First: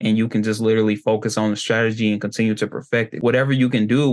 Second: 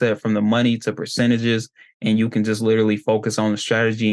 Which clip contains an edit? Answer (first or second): first